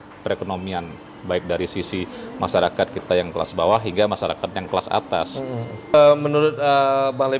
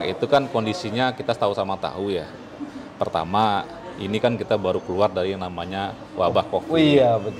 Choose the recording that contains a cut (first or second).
first